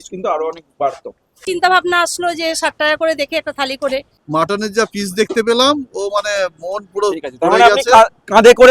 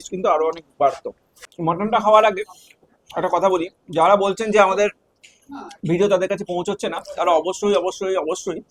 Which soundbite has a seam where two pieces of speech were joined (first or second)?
first